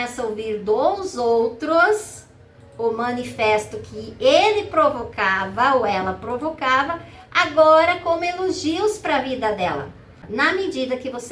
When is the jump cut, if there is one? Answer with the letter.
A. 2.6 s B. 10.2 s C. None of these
B